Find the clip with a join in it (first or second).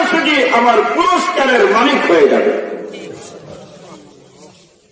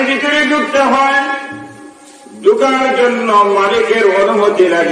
first